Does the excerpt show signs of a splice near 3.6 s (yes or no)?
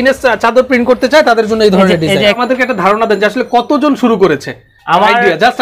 no